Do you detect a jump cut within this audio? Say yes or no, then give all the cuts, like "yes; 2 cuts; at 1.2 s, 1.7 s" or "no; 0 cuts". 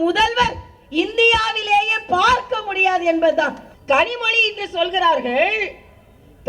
yes; 1 cut; at 3.7 s